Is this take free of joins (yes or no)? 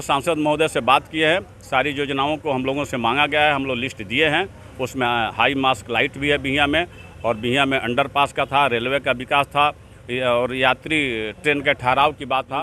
yes